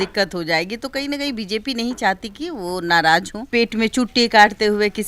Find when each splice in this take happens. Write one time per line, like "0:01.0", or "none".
0:03.4